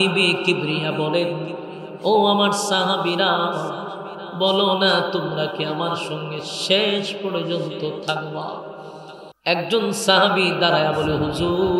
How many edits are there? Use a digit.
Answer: 1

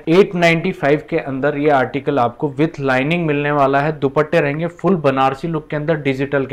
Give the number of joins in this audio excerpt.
0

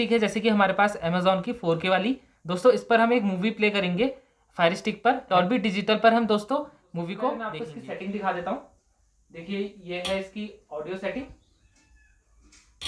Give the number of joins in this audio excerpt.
1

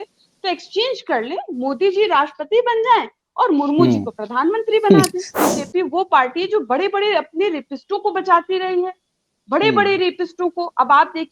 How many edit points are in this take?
1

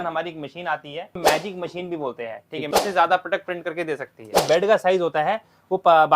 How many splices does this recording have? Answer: 3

